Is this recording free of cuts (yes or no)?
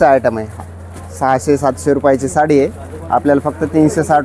yes